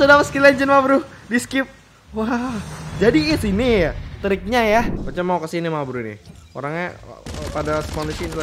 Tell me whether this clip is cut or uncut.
cut